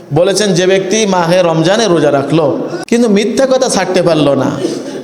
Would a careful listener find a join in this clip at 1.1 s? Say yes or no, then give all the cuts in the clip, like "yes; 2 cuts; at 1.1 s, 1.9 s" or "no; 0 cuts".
no; 1 cut; at 2.7 s